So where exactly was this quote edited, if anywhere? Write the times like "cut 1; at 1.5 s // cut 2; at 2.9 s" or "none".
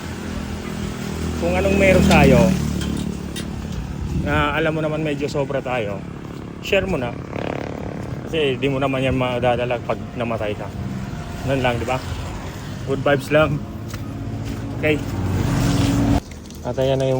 cut 1; at 16.2 s